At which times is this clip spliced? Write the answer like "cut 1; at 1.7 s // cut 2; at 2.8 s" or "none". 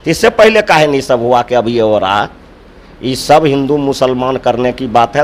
none